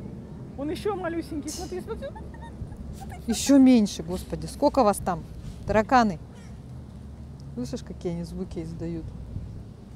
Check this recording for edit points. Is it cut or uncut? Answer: uncut